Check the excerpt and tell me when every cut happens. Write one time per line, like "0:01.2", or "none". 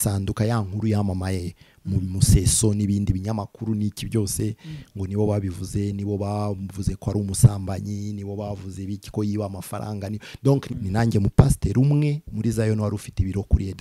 0:10.7